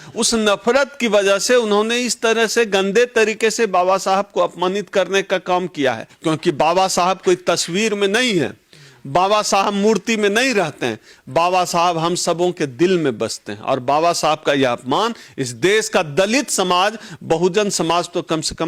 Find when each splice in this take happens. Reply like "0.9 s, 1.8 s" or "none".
6.1 s